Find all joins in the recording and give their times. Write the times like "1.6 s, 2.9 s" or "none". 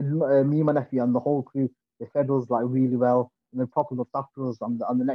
none